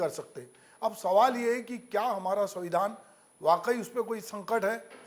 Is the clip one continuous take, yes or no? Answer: yes